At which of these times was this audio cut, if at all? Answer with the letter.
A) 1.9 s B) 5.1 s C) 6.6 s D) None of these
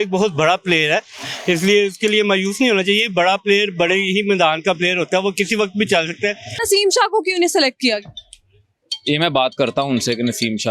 C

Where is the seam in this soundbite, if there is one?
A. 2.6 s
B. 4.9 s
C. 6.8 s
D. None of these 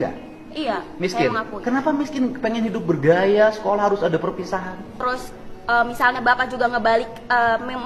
B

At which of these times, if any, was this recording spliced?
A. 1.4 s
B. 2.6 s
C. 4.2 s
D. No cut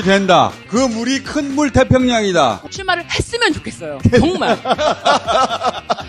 B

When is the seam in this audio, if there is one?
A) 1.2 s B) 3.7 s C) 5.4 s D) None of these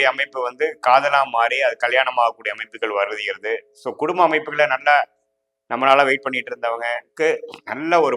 D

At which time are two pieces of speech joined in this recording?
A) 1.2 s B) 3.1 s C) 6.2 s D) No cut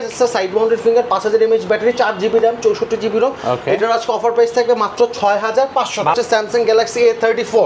C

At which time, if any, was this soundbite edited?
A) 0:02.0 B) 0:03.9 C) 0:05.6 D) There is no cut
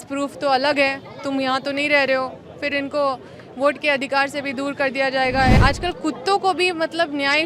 C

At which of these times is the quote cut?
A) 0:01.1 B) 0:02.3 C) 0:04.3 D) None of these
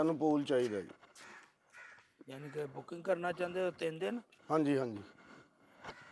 D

